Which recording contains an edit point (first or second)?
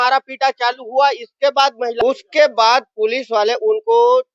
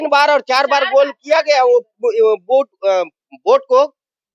first